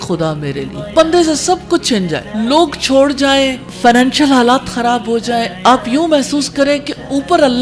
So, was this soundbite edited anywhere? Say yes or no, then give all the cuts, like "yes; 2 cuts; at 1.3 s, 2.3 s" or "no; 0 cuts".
yes; 1 cut; at 3.6 s